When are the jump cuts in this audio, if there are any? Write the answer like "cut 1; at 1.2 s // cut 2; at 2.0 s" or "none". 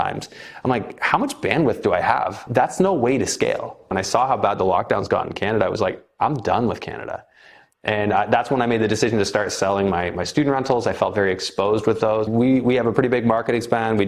cut 1; at 2.4 s // cut 2; at 4.0 s // cut 3; at 12.3 s

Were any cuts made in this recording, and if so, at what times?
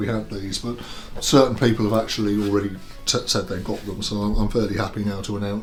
none

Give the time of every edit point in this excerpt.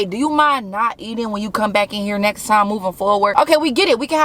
cut 1; at 3.3 s

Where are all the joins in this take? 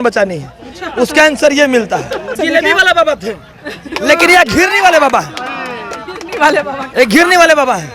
cut 1; at 2.4 s

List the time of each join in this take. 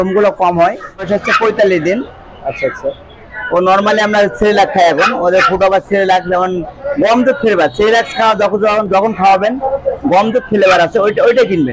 cut 1; at 1.1 s

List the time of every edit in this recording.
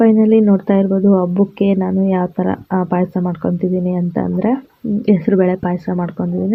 none

